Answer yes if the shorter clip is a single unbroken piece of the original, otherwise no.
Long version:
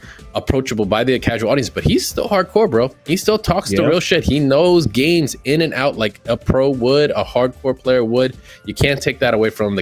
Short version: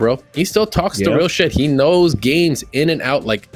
yes